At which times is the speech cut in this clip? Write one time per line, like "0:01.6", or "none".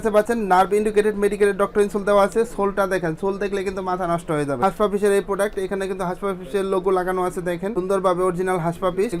0:04.5